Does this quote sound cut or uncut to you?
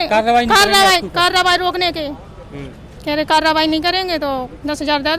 uncut